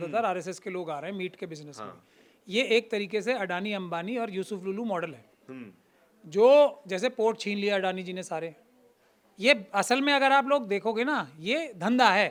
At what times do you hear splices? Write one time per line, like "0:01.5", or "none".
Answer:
none